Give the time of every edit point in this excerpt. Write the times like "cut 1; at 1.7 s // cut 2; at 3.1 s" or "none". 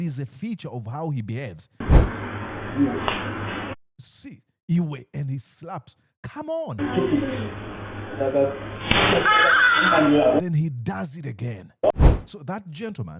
cut 1; at 1.8 s // cut 2; at 11.9 s